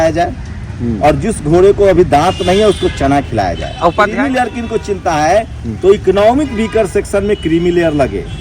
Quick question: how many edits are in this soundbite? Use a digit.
1